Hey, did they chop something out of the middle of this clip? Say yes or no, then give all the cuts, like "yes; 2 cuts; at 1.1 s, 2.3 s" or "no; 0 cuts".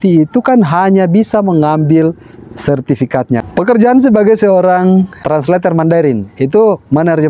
yes; 2 cuts; at 3.4 s, 5.1 s